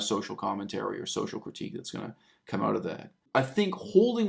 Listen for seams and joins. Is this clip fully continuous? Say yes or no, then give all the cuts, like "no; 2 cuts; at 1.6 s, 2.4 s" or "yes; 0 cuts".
no; 1 cut; at 3.2 s